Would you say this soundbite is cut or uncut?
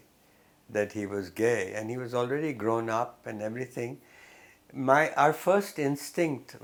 uncut